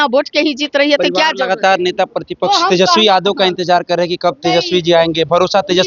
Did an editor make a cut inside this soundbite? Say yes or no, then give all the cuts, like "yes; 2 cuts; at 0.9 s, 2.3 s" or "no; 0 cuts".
no; 0 cuts